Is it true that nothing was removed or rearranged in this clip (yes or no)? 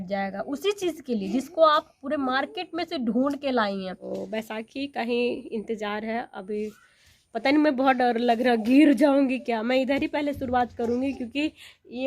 no